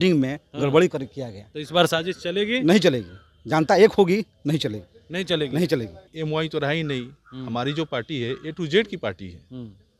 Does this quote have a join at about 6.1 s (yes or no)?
yes